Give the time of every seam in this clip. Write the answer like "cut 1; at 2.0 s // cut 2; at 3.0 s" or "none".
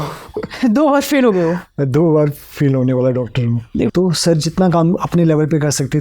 cut 1; at 3.9 s